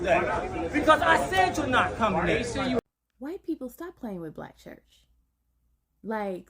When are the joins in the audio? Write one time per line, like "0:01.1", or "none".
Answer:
0:02.8

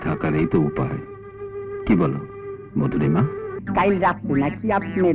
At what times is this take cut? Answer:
0:03.6

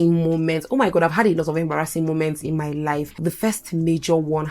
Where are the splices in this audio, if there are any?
0:03.1

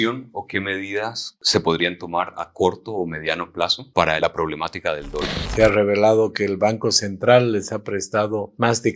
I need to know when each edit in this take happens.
0:01.3
0:03.8
0:05.4

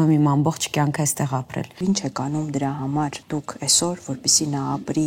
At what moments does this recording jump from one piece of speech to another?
0:01.8
0:03.2

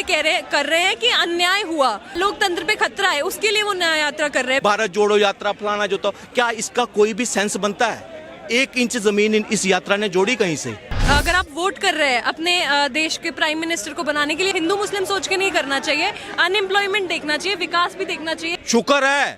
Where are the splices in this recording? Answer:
0:02.1
0:04.6
0:11.0
0:14.5
0:18.5

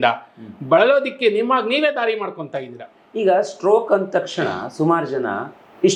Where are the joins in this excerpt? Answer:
none

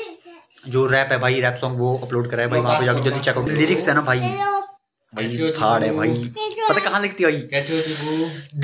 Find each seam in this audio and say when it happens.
0:03.5

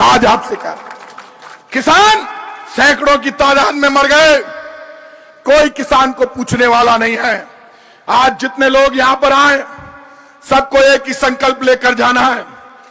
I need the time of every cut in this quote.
none

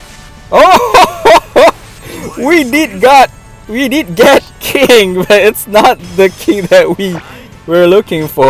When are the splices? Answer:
none

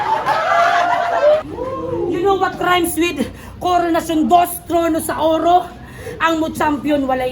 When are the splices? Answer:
0:01.4

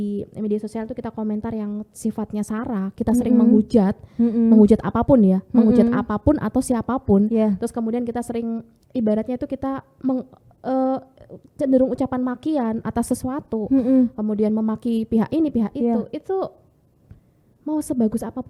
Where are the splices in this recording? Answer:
none

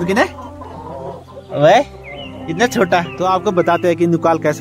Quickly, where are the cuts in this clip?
0:03.1

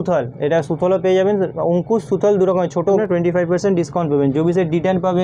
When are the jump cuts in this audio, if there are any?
0:03.0

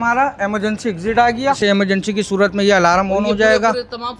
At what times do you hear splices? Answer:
0:01.6

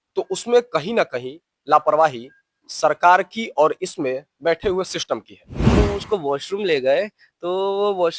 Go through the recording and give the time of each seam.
0:05.7

